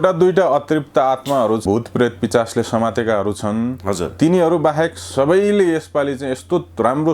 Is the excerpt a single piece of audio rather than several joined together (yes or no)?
no